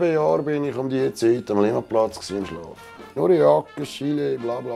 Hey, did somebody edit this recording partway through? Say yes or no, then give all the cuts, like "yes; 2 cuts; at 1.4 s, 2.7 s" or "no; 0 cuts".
yes; 1 cut; at 3.2 s